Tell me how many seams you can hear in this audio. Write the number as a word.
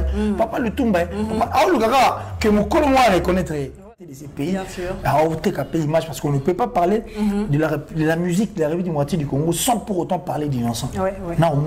one